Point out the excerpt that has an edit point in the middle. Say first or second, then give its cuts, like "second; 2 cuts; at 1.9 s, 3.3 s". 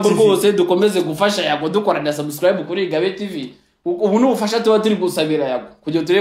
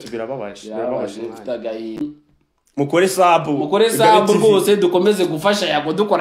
second; 1 cut; at 2.0 s